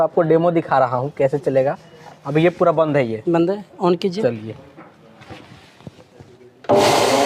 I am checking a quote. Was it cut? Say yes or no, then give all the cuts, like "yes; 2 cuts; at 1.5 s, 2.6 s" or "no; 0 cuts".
no; 0 cuts